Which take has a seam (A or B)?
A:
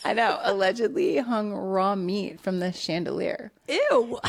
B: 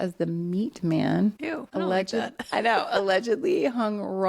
B